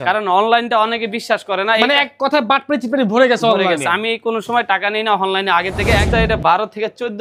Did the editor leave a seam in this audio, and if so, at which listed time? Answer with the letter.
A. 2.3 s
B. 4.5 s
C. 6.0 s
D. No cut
C